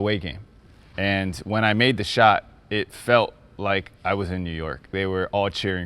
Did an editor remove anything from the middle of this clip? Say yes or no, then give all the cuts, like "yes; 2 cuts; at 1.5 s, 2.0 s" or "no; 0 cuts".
yes; 1 cut; at 4.9 s